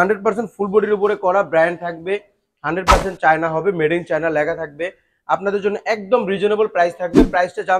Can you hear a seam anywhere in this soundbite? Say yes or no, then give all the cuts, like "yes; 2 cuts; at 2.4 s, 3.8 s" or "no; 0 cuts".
no; 0 cuts